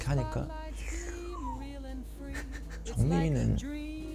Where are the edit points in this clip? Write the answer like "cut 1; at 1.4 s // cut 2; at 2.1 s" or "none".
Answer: none